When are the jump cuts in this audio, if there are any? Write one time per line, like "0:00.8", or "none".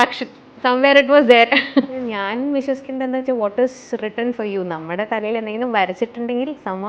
0:01.8